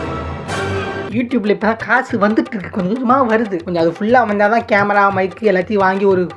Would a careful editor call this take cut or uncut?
uncut